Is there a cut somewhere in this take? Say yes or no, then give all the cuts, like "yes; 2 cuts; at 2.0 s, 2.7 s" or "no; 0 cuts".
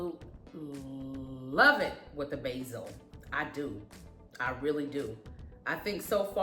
no; 0 cuts